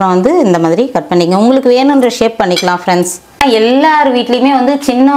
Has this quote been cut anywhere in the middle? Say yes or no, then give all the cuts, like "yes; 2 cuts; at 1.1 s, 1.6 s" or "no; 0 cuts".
yes; 1 cut; at 3.2 s